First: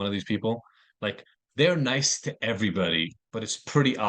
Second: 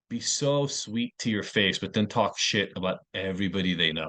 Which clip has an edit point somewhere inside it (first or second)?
first